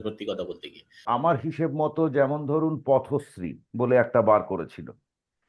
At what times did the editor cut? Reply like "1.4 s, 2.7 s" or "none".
1.0 s